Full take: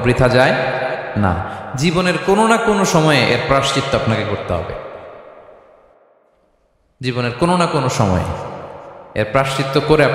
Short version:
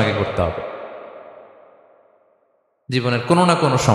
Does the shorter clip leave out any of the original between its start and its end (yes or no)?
no